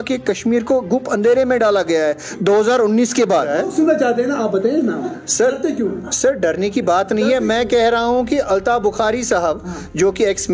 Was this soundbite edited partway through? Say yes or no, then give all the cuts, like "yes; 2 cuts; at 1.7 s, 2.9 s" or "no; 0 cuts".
yes; 1 cut; at 3.5 s